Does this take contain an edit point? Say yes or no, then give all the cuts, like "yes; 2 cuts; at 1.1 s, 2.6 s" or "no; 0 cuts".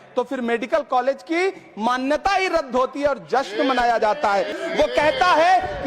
yes; 1 cut; at 4.5 s